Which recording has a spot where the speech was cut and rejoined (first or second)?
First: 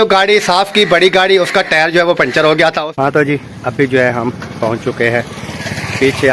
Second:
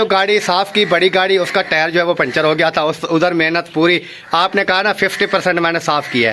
first